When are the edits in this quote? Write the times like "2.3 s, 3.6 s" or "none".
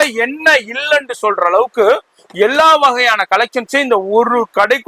none